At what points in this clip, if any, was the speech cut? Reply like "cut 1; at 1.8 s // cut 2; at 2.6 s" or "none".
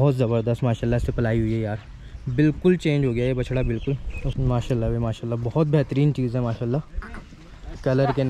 cut 1; at 4.2 s